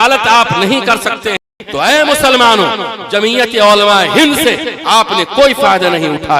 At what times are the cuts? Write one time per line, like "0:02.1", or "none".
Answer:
0:01.6